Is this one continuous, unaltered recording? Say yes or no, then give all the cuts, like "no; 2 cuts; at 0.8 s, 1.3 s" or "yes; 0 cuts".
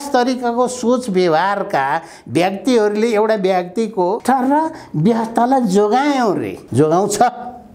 no; 2 cuts; at 4.2 s, 6.6 s